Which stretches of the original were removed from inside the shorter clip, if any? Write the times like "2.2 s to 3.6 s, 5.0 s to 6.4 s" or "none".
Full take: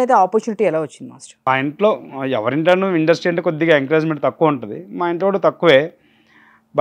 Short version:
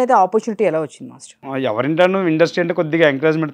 1.4 s to 2.0 s